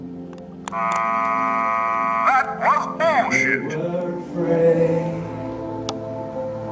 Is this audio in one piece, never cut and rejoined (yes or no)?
yes